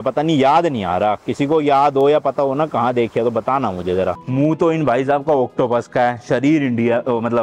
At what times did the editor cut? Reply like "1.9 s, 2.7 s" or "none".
4.2 s